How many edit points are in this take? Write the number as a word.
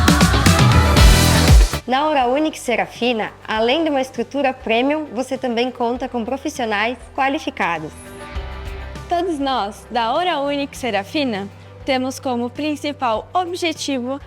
one